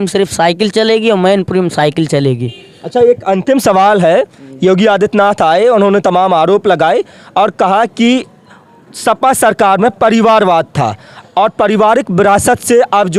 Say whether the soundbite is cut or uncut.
uncut